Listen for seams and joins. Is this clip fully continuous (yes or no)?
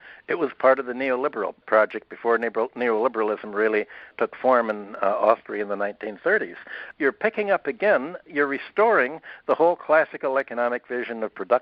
no